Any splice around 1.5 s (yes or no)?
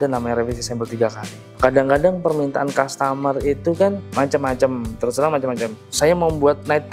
yes